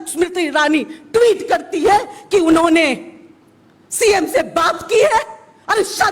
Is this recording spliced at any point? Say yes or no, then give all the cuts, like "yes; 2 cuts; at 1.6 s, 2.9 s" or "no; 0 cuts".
no; 0 cuts